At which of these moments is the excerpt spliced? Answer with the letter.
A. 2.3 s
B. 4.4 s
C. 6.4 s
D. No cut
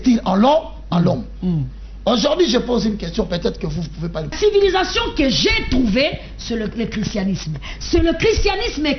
B